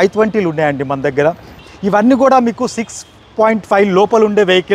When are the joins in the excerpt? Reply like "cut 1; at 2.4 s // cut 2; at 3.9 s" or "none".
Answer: cut 1; at 1.7 s

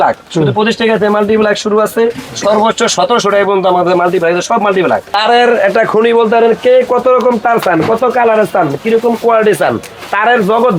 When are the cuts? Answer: cut 1; at 5.1 s

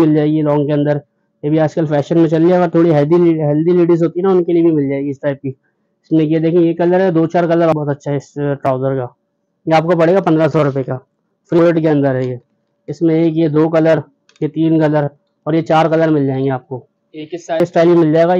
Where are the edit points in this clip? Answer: cut 1; at 7.7 s // cut 2; at 11.6 s // cut 3; at 17.6 s

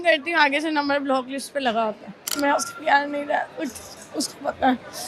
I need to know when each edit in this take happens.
cut 1; at 2.1 s

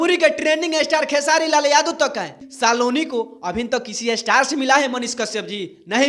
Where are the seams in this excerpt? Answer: cut 1; at 2.3 s

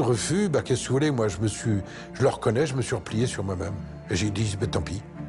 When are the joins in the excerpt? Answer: cut 1; at 3.9 s

